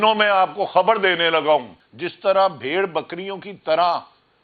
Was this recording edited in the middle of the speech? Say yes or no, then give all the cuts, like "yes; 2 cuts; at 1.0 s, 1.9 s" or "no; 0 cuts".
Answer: yes; 1 cut; at 1.7 s